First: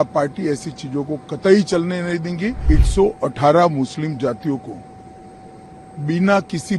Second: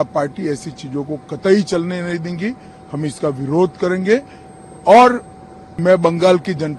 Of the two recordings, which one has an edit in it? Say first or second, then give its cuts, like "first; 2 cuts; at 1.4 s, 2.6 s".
first; 1 cut; at 2.6 s